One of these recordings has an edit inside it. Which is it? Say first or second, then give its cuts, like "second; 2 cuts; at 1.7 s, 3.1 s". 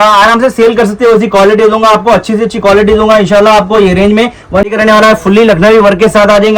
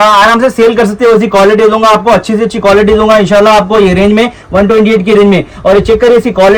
first; 1 cut; at 4.7 s